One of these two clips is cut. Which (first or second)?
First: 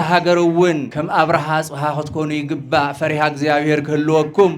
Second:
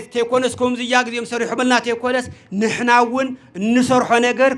first